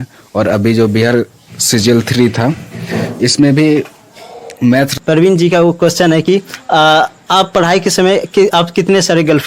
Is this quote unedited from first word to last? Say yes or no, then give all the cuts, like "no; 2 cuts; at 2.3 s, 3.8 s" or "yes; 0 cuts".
no; 1 cut; at 4.9 s